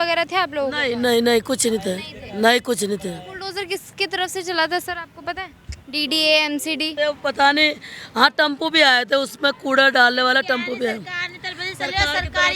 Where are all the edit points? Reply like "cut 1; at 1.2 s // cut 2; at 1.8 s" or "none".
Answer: none